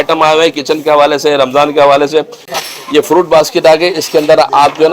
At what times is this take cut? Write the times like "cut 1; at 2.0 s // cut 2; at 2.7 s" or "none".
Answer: cut 1; at 2.4 s